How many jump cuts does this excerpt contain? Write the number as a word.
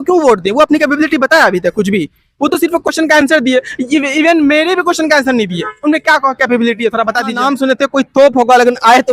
one